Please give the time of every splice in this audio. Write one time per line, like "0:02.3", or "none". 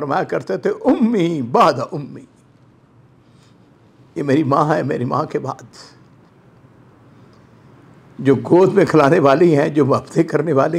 none